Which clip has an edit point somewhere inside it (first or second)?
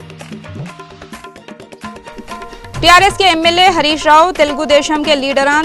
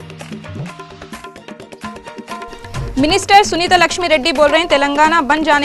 second